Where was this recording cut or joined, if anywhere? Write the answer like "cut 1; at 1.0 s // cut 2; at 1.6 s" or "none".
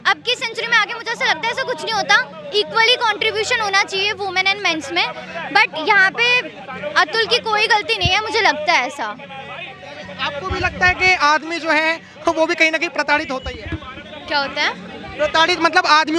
none